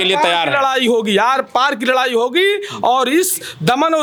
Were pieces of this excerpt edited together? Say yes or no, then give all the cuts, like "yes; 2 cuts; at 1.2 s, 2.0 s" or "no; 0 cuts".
no; 0 cuts